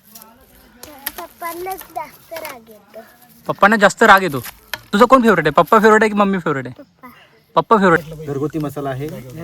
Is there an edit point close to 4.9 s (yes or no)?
yes